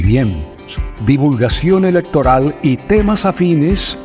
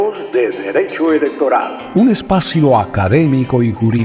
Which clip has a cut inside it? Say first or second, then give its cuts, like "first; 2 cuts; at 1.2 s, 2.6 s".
second; 1 cut; at 1.8 s